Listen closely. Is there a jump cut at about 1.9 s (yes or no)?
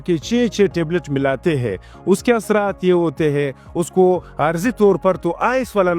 no